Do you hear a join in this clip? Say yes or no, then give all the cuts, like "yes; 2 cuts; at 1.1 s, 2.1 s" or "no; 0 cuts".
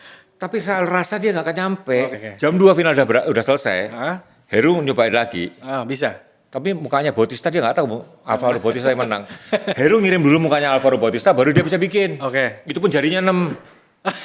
yes; 1 cut; at 2.1 s